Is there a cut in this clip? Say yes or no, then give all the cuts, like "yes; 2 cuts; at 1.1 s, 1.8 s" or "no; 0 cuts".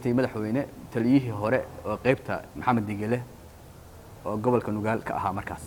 no; 0 cuts